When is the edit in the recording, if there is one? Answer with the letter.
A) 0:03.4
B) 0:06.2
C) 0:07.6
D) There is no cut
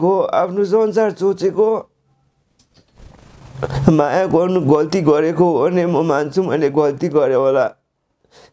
A